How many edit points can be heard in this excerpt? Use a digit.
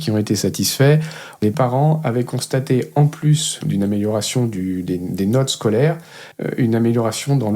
2